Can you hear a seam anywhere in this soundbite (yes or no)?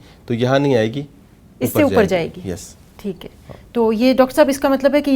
no